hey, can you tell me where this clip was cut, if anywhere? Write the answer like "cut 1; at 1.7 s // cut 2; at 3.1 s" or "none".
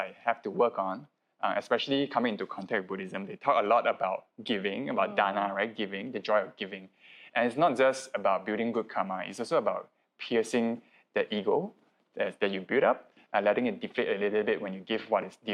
none